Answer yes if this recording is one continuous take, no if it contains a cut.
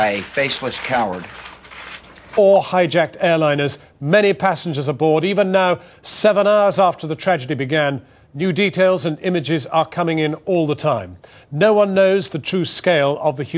yes